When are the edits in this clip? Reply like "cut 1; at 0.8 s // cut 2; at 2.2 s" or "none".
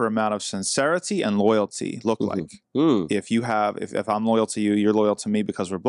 none